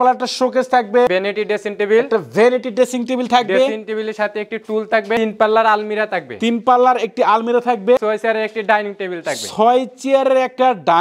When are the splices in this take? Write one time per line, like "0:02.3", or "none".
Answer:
0:01.1
0:05.2
0:08.0